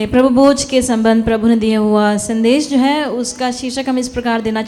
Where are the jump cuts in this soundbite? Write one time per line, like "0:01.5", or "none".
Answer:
none